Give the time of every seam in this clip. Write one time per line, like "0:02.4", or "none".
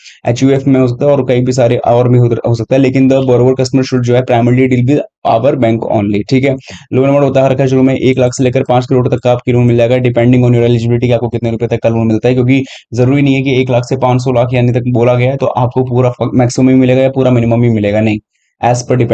none